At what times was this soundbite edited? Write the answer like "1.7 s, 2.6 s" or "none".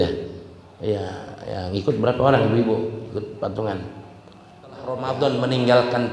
5.0 s